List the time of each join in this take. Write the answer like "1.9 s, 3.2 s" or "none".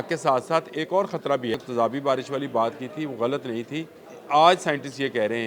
1.6 s, 4.1 s